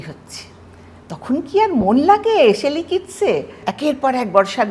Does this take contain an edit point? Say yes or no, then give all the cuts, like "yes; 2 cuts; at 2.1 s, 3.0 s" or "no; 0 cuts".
yes; 1 cut; at 3.6 s